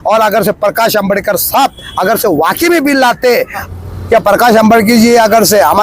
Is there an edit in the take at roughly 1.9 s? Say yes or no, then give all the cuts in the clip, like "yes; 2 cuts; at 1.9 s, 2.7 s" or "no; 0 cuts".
no; 1 cut; at 3.7 s